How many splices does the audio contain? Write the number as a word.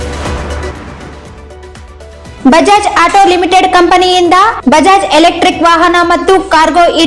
one